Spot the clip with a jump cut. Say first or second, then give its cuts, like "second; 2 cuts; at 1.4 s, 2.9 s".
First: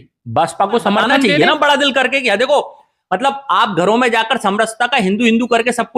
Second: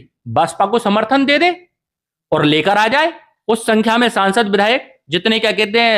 first; 1 cut; at 1.3 s